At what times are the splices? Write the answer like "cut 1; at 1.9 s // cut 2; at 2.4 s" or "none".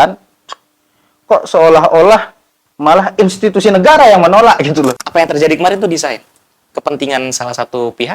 cut 1; at 5.0 s